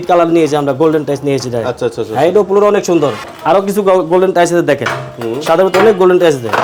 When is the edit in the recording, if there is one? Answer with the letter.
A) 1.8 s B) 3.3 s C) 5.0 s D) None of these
B